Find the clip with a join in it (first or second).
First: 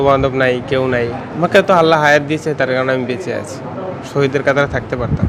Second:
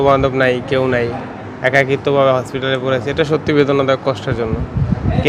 first